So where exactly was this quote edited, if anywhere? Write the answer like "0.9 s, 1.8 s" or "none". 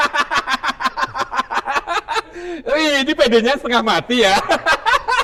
none

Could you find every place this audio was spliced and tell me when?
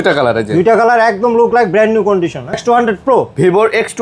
2.6 s

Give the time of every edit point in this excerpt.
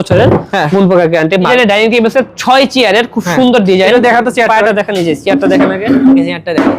1.5 s

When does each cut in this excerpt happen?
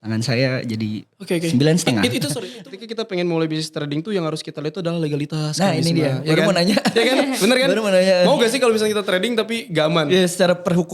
2.3 s

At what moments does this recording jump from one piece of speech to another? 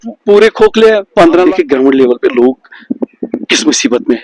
1.3 s

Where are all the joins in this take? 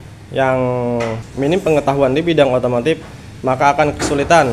1.2 s

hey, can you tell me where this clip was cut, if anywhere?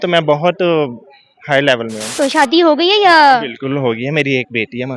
2.1 s

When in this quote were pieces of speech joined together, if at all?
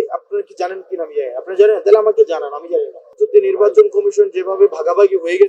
3.1 s

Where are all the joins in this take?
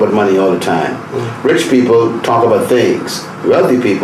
none

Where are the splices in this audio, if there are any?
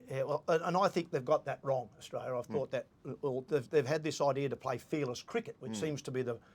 none

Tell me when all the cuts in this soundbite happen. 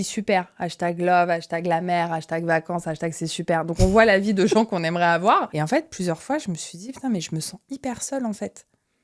5.5 s

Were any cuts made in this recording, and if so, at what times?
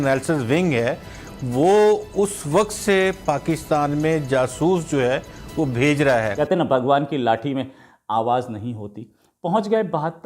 6.3 s

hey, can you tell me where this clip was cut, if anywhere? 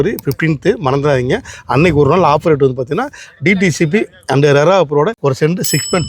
5.2 s

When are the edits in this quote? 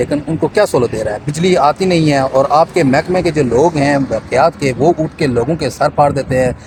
none

